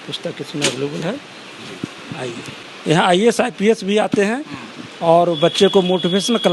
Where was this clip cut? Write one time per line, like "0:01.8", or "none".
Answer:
0:02.5